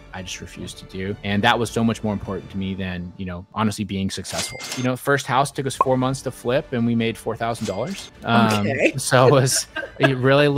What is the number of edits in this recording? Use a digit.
4